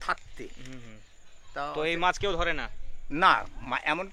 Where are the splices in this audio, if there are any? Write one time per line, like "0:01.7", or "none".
none